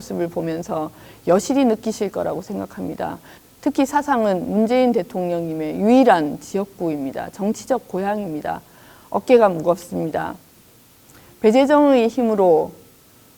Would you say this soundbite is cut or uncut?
cut